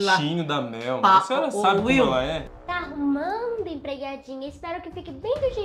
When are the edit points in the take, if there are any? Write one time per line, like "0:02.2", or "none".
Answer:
0:02.4